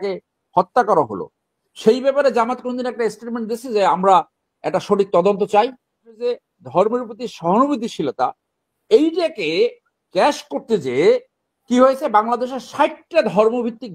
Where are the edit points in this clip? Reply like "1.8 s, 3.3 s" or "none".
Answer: 6.1 s